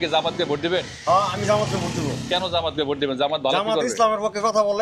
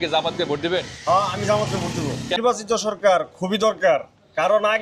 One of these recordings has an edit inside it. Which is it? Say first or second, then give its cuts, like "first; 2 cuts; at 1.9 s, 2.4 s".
second; 1 cut; at 2.4 s